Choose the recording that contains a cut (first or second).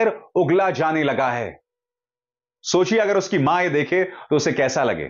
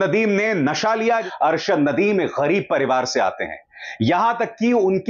second